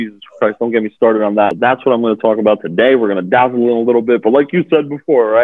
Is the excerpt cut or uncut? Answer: cut